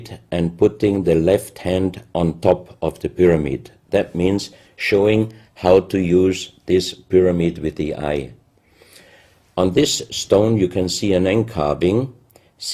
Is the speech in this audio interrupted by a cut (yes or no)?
no